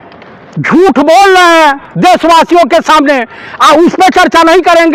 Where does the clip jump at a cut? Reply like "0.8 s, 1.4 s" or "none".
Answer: none